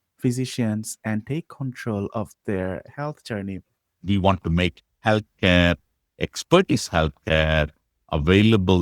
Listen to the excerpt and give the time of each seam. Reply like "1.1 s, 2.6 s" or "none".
4.0 s